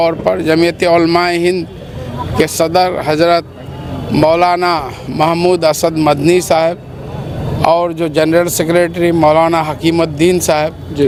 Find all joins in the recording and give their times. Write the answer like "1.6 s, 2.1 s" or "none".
none